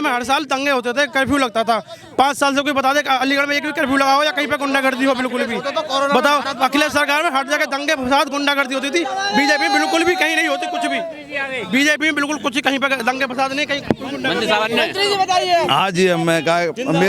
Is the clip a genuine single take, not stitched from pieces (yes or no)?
yes